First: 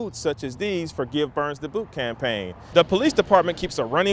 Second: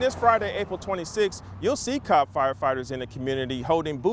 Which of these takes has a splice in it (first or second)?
first